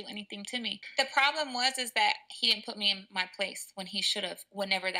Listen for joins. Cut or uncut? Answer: uncut